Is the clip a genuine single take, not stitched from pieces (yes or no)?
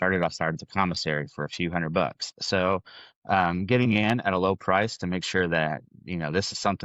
yes